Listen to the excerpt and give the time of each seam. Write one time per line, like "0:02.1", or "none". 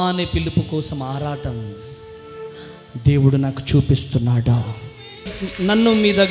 0:05.4